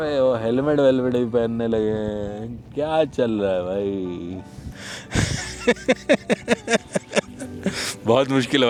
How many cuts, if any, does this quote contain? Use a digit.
0